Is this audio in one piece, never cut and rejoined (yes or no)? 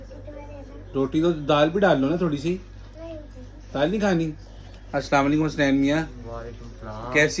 yes